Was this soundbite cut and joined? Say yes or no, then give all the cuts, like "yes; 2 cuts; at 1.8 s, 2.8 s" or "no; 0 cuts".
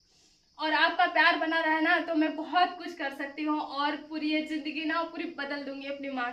no; 0 cuts